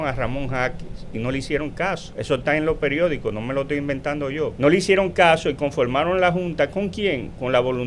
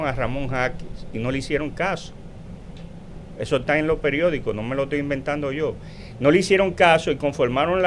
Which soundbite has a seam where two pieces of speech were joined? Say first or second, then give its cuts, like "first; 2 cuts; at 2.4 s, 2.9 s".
first; 2 cuts; at 2.1 s, 4.5 s